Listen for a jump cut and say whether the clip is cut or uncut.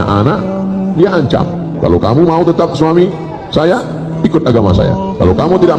uncut